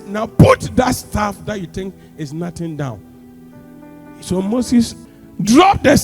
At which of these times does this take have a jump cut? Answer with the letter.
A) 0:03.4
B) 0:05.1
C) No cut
B